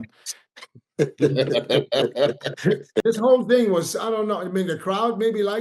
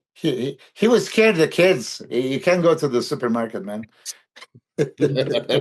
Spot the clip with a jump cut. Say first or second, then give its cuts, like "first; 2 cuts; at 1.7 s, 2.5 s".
first; 1 cut; at 3.0 s